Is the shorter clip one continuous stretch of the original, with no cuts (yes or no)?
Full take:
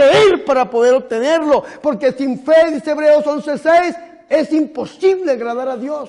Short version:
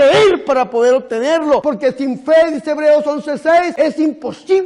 no